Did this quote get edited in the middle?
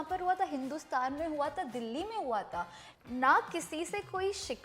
yes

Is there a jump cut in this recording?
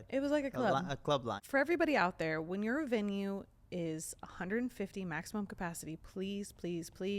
yes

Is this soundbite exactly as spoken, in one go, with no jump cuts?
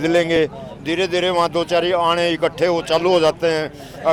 yes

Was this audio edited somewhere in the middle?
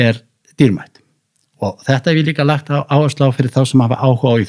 no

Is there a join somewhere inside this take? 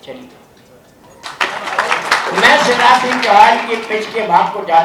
yes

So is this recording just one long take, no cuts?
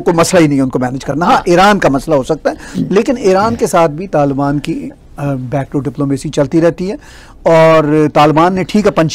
yes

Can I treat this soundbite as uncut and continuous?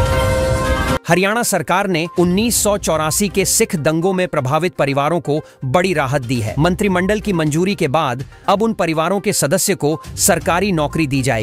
no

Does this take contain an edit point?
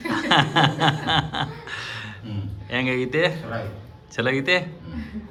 no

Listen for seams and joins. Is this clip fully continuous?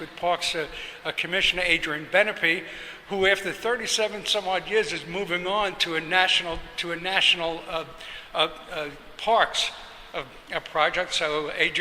no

